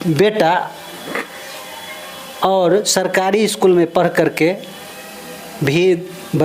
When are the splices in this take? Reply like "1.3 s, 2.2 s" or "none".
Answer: none